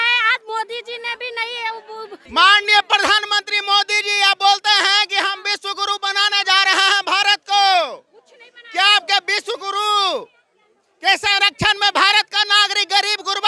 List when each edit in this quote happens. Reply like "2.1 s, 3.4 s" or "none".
2.2 s